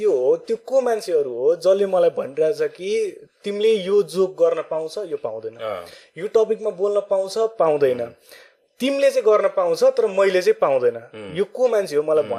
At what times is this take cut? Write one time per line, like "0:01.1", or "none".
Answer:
none

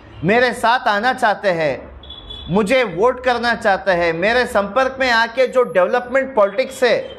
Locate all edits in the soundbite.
none

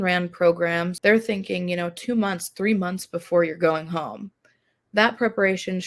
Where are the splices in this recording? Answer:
0:00.9

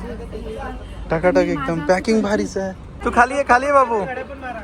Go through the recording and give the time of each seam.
0:02.9

